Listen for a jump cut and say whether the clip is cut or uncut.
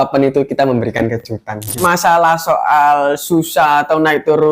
cut